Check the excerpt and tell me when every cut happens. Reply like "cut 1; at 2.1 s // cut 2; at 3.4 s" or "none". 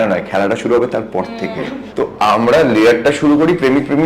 cut 1; at 1.8 s

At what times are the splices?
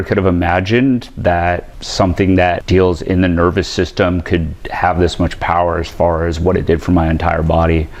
cut 1; at 1.8 s // cut 2; at 2.6 s

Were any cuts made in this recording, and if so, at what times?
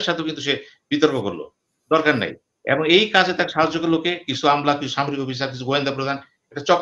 none

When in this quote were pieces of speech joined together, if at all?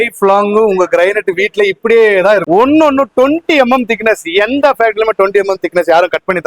cut 1; at 2.4 s

